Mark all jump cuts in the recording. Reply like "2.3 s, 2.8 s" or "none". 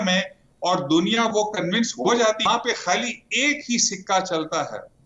2.4 s